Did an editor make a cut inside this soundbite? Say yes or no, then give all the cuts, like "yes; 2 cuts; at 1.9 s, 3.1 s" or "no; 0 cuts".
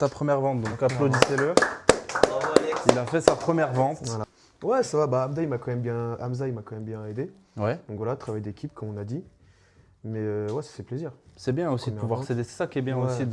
no; 0 cuts